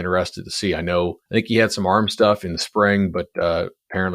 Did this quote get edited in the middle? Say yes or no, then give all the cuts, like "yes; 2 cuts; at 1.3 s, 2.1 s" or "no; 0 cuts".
yes; 1 cut; at 1.2 s